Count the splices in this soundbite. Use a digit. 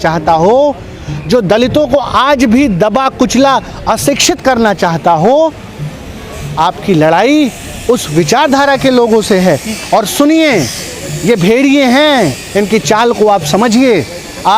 0